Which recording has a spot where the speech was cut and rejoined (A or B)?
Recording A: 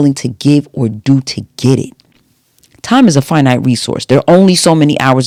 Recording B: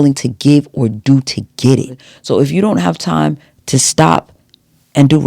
B